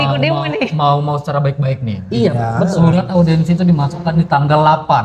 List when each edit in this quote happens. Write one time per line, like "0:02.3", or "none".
none